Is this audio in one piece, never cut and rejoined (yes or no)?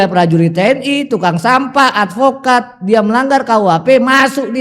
yes